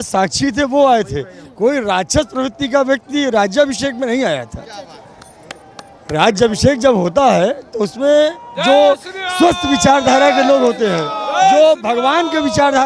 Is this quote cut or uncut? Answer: uncut